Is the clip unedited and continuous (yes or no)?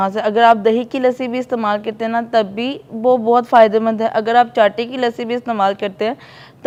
yes